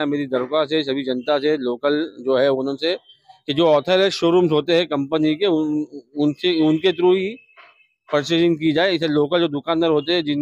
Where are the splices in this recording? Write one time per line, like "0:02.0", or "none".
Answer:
none